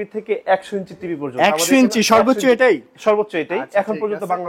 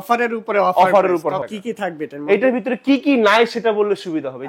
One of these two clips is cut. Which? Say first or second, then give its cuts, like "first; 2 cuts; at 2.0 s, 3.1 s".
second; 1 cut; at 1.5 s